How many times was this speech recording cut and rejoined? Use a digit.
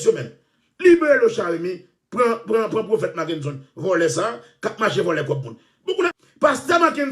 1